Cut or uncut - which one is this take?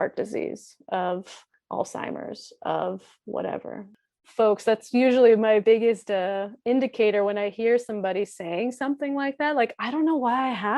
cut